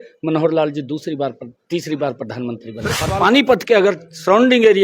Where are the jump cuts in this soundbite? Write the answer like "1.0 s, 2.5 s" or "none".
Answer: 2.9 s